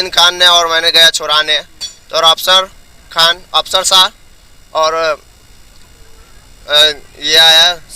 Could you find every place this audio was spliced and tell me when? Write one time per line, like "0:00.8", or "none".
none